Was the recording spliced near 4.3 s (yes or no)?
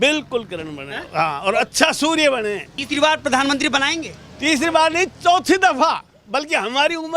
no